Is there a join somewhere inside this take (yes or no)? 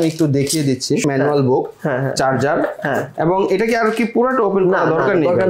yes